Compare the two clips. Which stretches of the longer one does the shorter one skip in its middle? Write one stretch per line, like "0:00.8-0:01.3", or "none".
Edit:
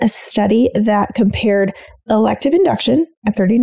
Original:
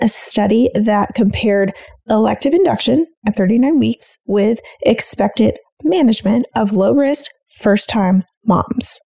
none